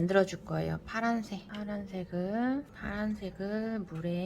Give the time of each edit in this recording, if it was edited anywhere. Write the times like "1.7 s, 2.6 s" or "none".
1.5 s, 2.7 s